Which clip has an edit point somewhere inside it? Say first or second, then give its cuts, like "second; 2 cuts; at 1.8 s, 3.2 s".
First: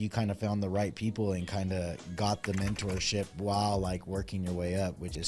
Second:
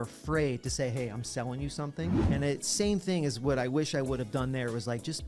second; 1 cut; at 2.2 s